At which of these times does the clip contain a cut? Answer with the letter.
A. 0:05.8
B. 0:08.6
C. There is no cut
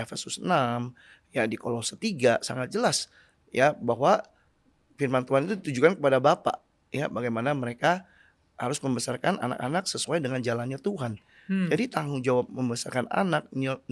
C